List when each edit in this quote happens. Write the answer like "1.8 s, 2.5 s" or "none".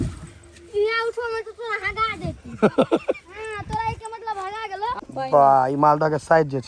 5.0 s